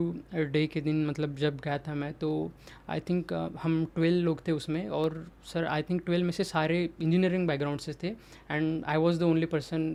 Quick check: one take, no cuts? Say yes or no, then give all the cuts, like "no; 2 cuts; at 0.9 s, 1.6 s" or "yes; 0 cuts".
yes; 0 cuts